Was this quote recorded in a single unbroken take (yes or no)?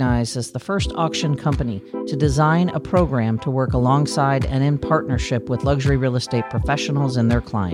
yes